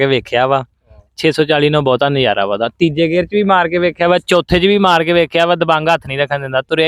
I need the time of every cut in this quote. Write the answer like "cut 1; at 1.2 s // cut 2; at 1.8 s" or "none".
none